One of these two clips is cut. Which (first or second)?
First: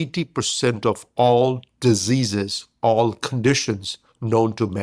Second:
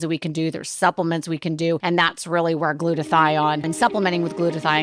second